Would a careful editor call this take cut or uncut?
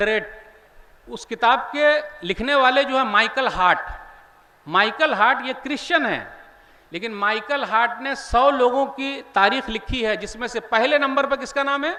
uncut